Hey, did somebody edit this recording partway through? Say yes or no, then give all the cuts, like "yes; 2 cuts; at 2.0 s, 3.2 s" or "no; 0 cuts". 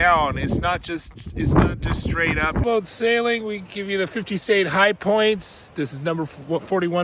yes; 1 cut; at 2.6 s